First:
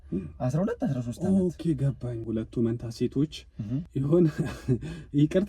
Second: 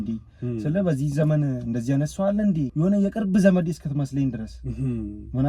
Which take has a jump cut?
first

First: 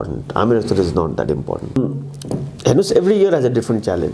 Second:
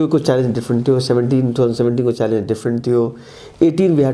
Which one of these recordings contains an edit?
first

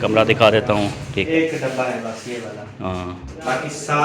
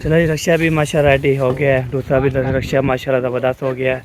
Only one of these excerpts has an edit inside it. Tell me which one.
first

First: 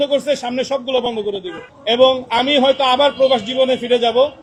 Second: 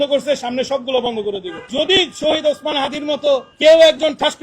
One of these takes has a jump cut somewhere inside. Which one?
second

